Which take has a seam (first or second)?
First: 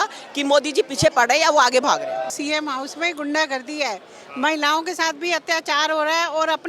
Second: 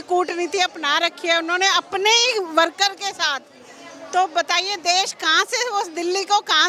first